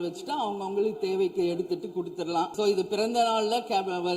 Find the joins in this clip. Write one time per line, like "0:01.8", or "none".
0:02.5